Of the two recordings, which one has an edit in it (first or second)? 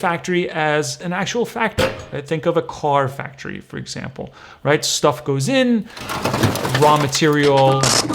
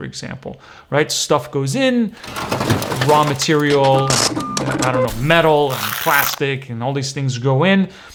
first